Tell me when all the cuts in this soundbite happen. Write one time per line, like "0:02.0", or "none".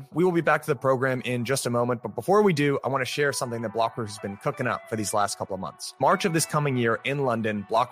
none

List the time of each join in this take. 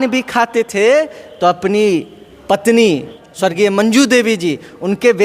0:03.2

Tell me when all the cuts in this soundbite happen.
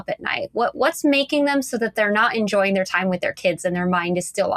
none

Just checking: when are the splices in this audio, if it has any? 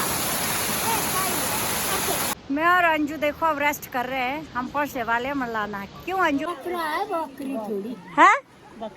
0:02.4
0:06.5

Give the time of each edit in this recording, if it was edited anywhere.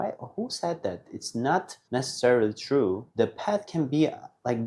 0:01.8
0:03.0

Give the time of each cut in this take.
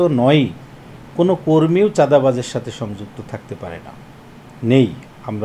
none

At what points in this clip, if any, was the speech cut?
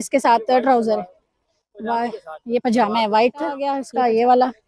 0:03.8

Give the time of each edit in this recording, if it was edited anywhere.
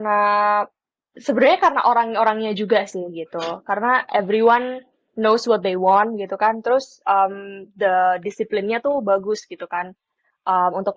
none

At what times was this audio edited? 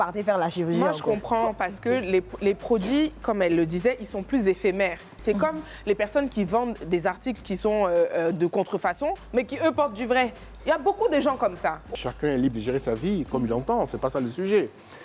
0:05.1
0:11.9

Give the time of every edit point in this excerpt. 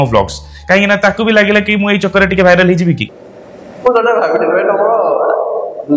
0:03.2

